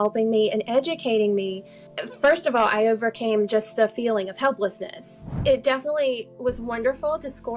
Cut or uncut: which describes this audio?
cut